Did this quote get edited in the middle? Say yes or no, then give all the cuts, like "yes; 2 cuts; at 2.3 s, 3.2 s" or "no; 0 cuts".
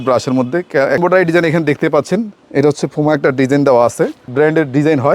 yes; 2 cuts; at 1.0 s, 4.2 s